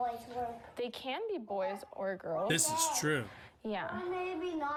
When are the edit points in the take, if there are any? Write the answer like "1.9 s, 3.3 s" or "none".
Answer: none